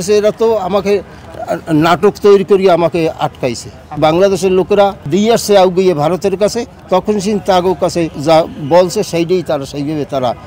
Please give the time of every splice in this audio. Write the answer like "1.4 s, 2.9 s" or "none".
4.0 s, 5.0 s, 8.1 s